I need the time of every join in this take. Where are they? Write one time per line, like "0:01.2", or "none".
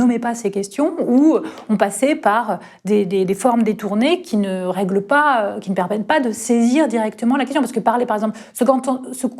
none